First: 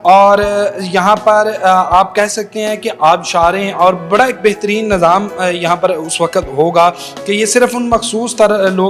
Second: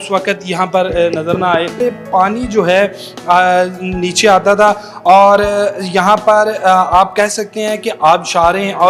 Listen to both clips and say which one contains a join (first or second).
second